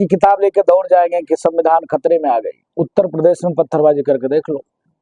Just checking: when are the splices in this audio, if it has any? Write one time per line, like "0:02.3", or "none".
0:02.6